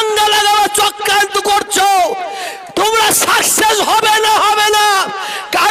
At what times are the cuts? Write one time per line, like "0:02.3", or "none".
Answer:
none